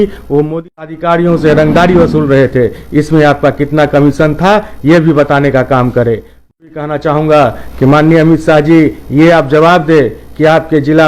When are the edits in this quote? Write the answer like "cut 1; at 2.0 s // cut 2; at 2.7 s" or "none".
cut 1; at 0.9 s // cut 2; at 6.7 s